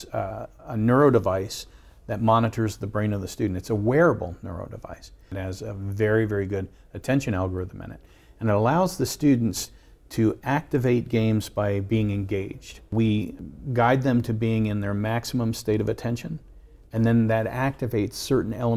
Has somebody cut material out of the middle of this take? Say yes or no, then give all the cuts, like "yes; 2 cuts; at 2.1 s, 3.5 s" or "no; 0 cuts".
yes; 3 cuts; at 5.3 s, 12.9 s, 13.5 s